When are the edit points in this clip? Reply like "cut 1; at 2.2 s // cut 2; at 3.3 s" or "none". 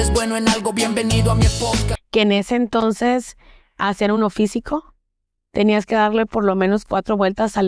cut 1; at 2.0 s